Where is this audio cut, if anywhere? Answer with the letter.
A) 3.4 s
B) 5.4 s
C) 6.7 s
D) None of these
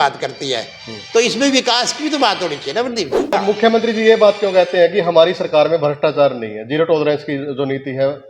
A